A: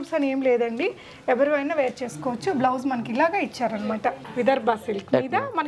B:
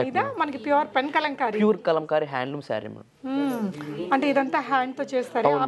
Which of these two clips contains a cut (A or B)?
A